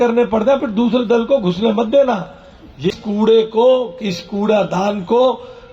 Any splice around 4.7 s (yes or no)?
no